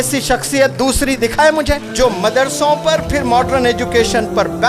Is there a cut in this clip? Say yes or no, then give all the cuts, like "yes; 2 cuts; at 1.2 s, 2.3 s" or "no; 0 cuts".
no; 0 cuts